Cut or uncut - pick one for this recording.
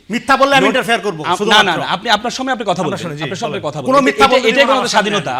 uncut